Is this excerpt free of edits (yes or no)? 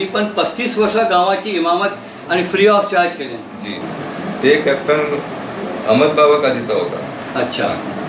no